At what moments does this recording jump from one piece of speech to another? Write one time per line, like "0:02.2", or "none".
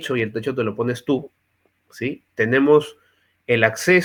none